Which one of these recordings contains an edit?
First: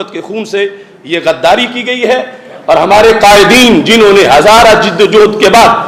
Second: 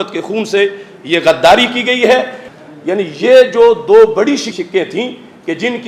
second; 2 cuts; at 2.5 s, 4.5 s

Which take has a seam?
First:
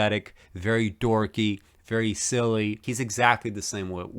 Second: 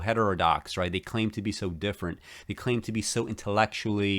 first; 1 cut; at 2.9 s

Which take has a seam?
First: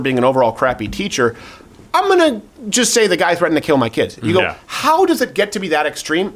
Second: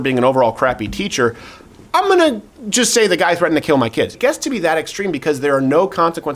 second; 1 cut; at 4.1 s

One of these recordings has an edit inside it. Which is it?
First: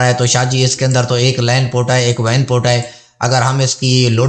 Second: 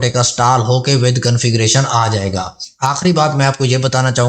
second; 1 cut; at 2.6 s

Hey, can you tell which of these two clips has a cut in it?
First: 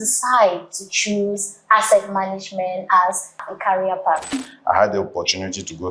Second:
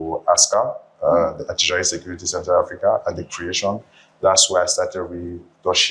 first; 2 cuts; at 3.5 s, 4.3 s

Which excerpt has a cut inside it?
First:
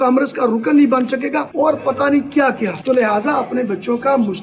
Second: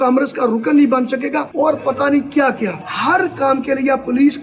first; 1 cut; at 2.8 s

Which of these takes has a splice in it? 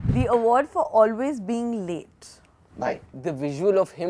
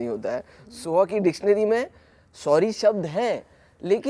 first; 1 cut; at 3.2 s

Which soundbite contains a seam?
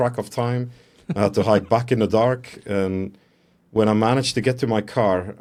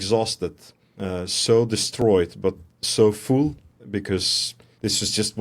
second; 1 cut; at 4.1 s

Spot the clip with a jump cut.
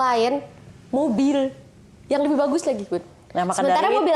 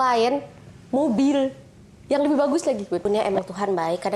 second; 1 cut; at 3.0 s

